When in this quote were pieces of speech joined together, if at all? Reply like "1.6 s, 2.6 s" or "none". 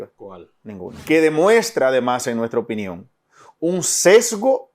1.0 s